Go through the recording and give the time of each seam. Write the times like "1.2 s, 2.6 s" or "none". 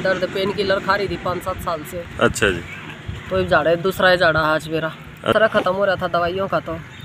5.3 s